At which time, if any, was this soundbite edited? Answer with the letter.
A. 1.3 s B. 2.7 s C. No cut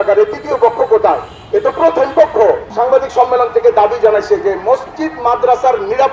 B